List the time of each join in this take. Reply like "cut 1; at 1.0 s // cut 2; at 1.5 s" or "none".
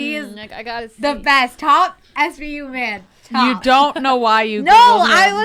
none

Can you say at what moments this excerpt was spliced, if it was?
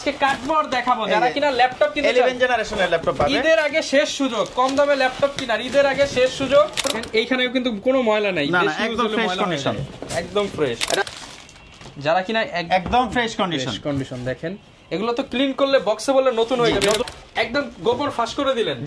cut 1; at 7.0 s // cut 2; at 11.0 s // cut 3; at 17.0 s

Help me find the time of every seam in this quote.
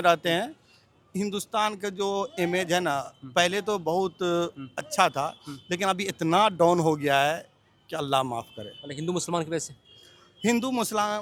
none

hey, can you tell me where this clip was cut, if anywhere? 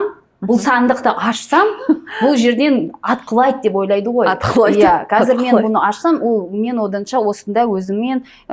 none

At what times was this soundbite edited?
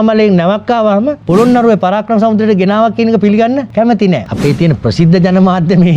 cut 1; at 1.2 s // cut 2; at 4.2 s

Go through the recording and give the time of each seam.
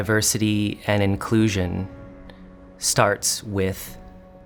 none

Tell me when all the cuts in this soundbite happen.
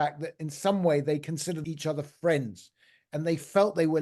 cut 1; at 1.6 s

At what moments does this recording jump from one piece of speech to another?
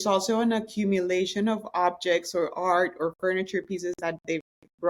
none

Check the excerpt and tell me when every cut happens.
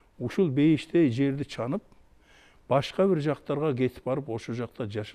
none

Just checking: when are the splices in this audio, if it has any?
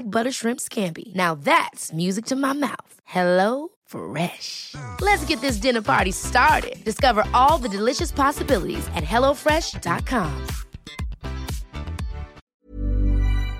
cut 1; at 12.4 s

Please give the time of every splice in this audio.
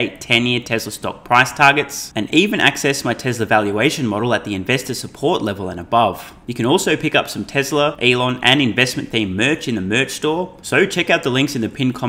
cut 1; at 6.4 s // cut 2; at 8.0 s // cut 3; at 10.6 s

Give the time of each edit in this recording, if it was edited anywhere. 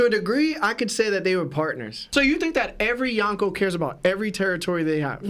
cut 1; at 2.1 s

